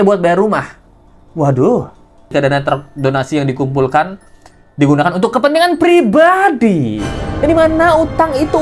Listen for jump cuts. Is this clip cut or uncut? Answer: cut